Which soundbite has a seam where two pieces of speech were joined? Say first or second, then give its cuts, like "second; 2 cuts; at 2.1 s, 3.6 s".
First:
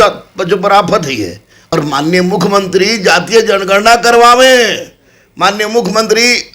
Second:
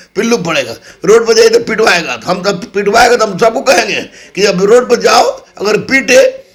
first; 1 cut; at 1.6 s